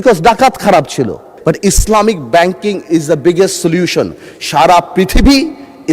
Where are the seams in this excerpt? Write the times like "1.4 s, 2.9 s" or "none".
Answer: 1.3 s